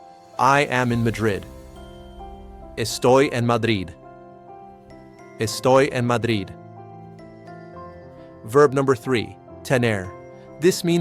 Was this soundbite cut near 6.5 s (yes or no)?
yes